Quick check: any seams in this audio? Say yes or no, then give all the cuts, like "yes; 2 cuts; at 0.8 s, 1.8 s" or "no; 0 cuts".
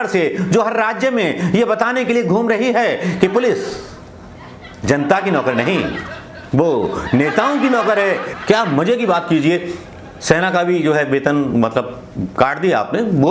yes; 1 cut; at 8.2 s